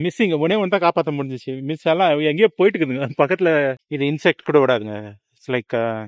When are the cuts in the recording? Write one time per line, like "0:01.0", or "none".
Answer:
0:03.8